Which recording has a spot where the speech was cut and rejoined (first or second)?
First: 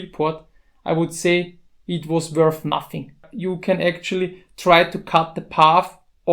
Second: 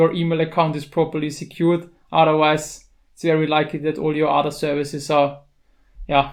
first